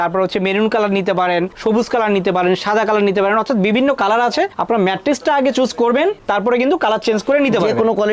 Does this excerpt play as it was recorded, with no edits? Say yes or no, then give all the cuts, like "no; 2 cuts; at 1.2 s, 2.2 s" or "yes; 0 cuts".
no; 1 cut; at 6.2 s